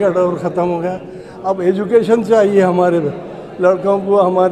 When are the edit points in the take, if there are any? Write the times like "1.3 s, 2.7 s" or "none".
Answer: none